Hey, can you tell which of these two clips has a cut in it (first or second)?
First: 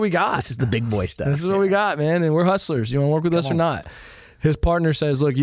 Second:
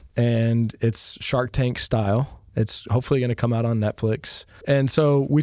second